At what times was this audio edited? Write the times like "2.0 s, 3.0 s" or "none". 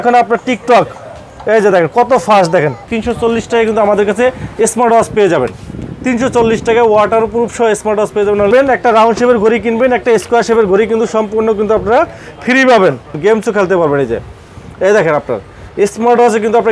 2.9 s, 8.5 s, 13.1 s

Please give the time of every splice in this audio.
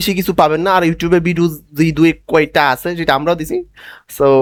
none

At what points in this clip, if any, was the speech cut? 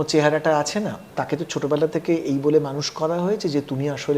1.1 s

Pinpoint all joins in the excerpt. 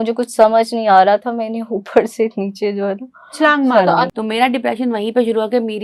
4.1 s

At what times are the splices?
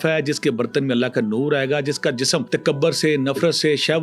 2.5 s

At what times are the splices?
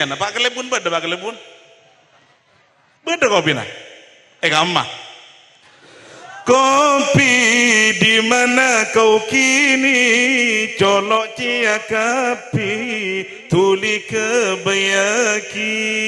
none

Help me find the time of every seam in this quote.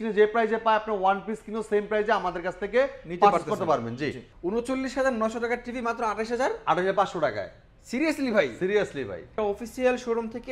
4.2 s, 9.3 s

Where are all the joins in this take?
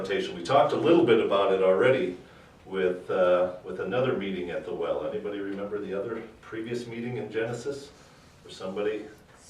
4.2 s

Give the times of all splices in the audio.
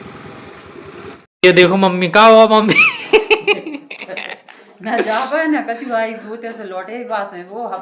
1.2 s

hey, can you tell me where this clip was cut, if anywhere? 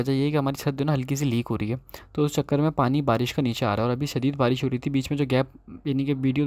none

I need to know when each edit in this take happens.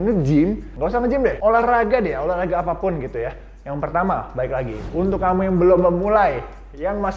1.2 s

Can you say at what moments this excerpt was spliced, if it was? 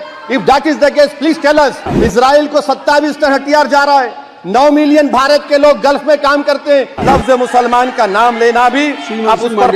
1.9 s, 7.0 s

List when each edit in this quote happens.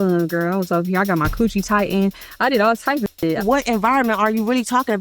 3.4 s

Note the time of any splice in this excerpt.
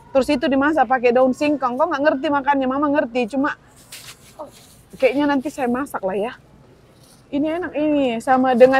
none

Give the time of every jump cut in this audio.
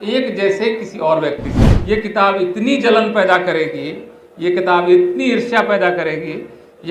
1.6 s

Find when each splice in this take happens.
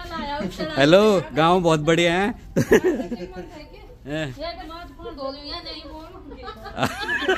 none

